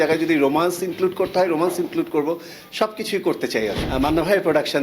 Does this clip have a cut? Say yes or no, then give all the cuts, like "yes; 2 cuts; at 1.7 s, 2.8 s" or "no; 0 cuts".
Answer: yes; 1 cut; at 3.8 s